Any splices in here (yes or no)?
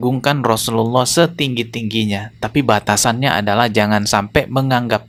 no